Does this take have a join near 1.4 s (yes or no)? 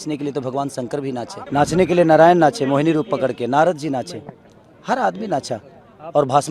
yes